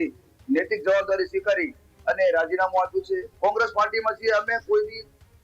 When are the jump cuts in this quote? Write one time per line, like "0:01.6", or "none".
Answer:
0:03.3